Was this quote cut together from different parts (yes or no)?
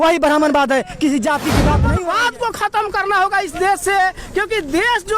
yes